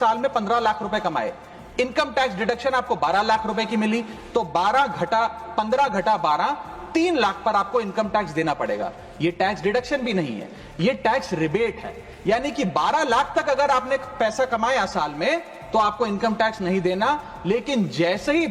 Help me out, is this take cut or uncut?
uncut